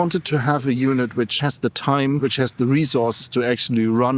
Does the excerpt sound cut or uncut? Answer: cut